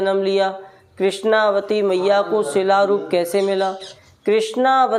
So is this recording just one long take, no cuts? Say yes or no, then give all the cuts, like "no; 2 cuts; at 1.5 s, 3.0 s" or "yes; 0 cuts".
no; 1 cut; at 3.9 s